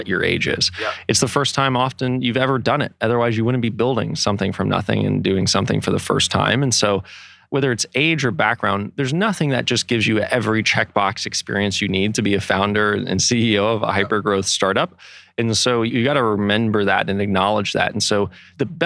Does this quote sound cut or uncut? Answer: uncut